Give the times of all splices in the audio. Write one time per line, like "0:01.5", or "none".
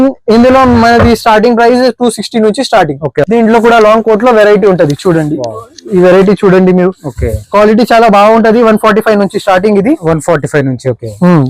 0:03.3